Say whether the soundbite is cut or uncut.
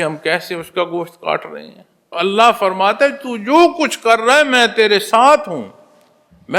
cut